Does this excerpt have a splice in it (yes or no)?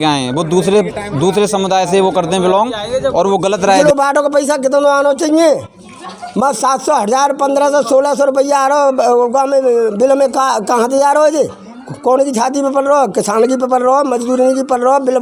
yes